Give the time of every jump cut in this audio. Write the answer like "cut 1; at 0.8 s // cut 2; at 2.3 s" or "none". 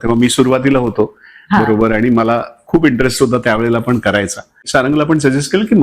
cut 1; at 4.6 s